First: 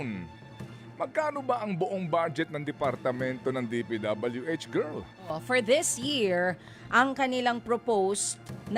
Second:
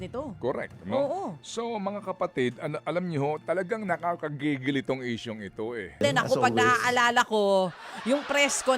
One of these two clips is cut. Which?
second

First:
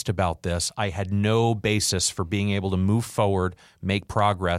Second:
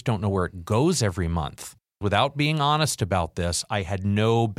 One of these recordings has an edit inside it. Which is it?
second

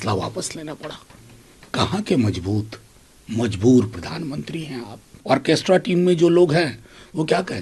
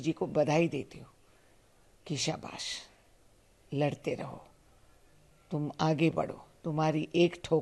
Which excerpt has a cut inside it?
first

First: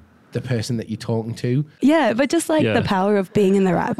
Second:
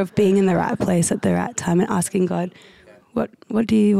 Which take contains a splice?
first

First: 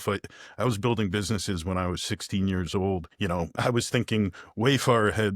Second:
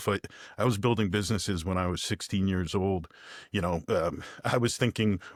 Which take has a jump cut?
first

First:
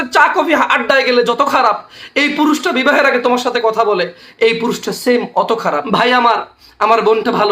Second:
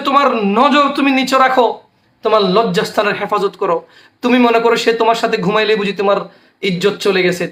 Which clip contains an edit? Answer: first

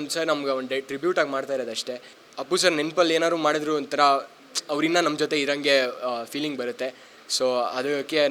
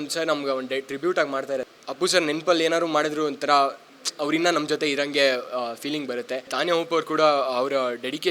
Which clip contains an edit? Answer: second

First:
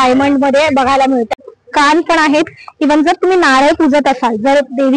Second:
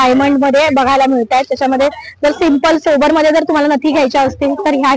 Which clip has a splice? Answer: first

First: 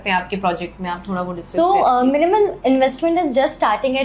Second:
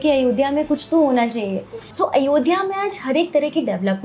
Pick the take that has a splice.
second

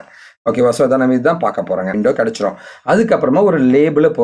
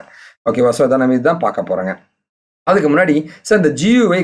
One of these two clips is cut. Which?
first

